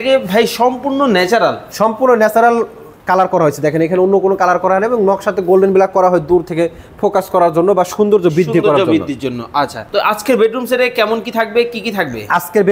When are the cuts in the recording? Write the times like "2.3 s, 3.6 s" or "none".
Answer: 9.8 s